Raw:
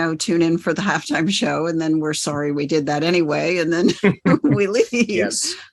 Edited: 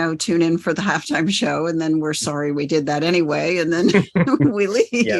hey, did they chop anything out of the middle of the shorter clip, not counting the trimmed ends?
no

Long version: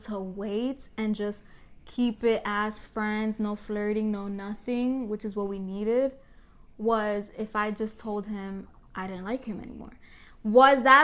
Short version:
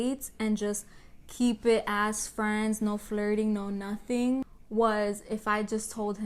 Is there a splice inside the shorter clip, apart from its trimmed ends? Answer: yes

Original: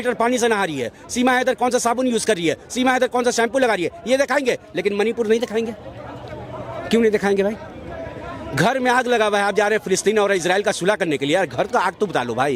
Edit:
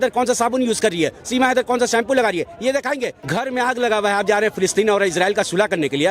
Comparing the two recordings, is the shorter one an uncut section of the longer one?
no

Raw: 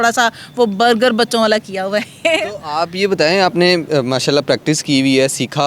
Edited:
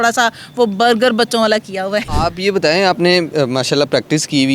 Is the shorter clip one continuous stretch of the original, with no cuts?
no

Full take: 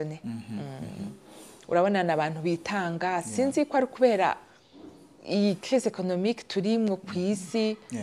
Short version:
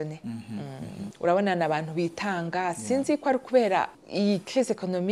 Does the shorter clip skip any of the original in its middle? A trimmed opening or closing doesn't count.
yes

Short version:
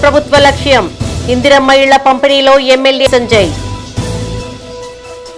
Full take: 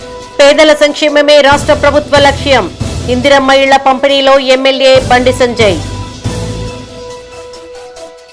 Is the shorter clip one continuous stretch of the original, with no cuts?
no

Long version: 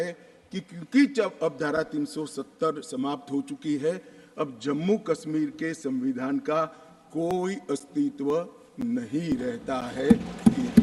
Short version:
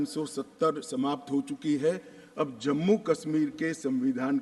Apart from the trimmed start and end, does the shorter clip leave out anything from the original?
no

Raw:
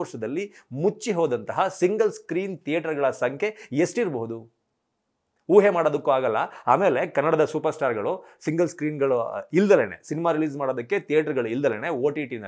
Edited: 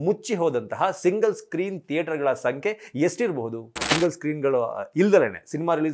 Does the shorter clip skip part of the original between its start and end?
yes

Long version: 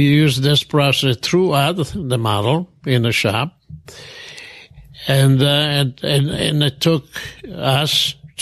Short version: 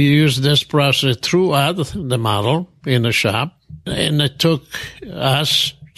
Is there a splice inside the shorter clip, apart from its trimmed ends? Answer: yes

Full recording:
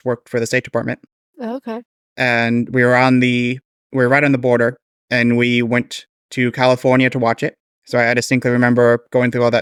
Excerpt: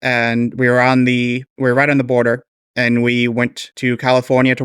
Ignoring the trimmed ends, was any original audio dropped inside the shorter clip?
yes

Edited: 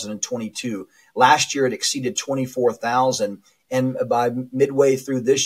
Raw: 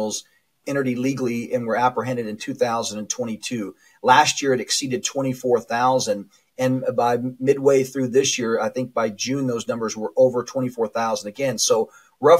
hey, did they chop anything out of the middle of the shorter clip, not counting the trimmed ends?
no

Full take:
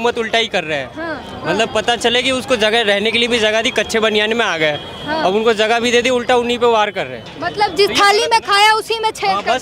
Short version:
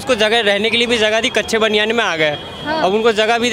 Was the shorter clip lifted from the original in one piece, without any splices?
yes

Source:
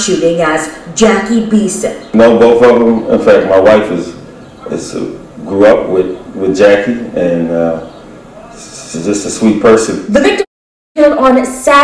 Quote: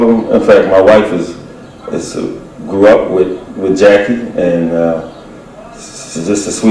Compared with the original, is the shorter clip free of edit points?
yes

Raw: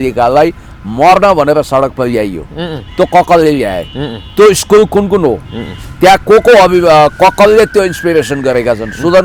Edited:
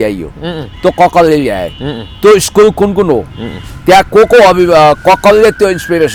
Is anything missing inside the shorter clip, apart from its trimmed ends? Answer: no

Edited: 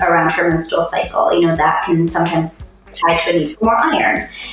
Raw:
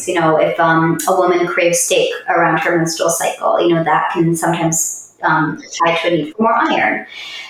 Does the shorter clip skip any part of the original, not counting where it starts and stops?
yes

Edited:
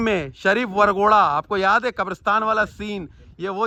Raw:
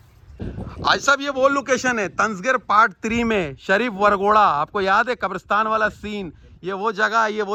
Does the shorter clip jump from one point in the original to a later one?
no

